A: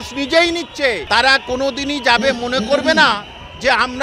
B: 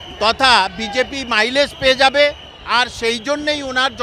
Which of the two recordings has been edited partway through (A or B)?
A